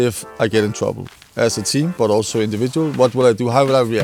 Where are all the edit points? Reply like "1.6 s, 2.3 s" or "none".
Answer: none